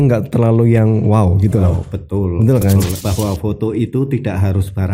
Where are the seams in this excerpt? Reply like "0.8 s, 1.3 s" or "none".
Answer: 3.0 s